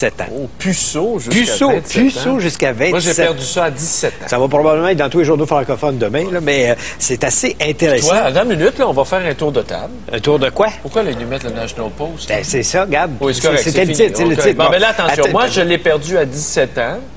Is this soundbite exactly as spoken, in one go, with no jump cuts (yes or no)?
no